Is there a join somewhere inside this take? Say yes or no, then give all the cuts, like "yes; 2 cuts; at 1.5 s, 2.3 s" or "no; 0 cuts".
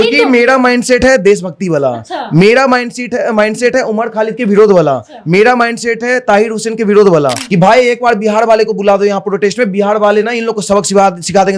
yes; 1 cut; at 7.4 s